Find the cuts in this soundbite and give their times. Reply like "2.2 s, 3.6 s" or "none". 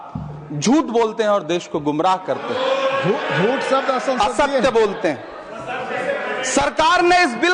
none

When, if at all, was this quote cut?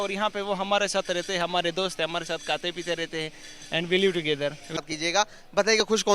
4.8 s

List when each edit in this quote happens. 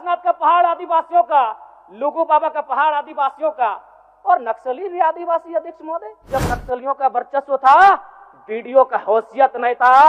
6.2 s

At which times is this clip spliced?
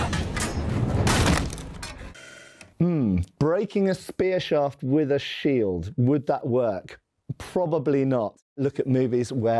none

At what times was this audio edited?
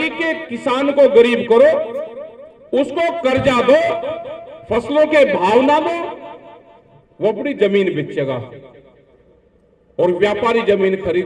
none

